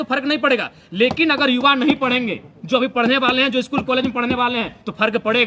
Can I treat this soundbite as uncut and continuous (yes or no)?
yes